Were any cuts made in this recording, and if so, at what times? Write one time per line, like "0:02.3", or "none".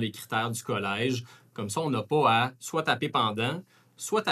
none